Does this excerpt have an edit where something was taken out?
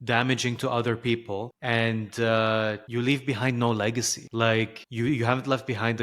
yes; 4 cuts; at 1.5 s, 2.8 s, 4.2 s, 4.8 s

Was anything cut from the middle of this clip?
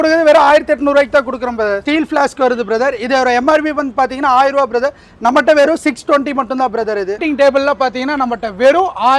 yes; 2 cuts; at 1.8 s, 7.2 s

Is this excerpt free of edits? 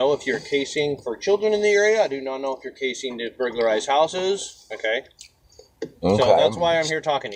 yes; 0 cuts

